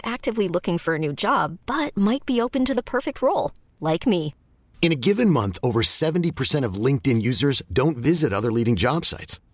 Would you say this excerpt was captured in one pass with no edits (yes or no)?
yes